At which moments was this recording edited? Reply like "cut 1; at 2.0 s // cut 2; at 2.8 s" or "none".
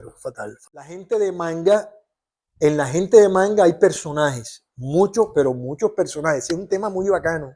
cut 1; at 1.0 s